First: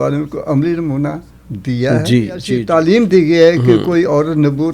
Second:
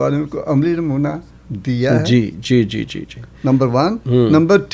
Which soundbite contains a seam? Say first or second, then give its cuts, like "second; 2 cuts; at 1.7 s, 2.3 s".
first; 1 cut; at 2.5 s